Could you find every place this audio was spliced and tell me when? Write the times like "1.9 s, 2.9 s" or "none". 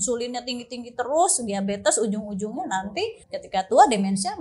3.2 s